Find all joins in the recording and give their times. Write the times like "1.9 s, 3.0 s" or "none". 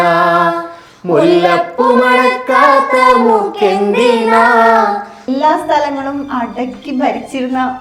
5.3 s